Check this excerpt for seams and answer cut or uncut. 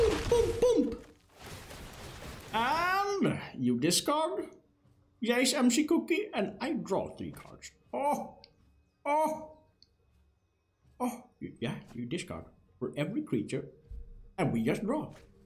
uncut